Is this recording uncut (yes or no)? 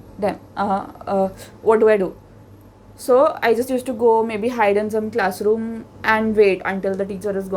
no